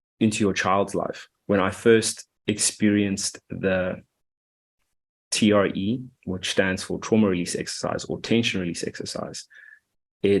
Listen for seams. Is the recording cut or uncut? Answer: cut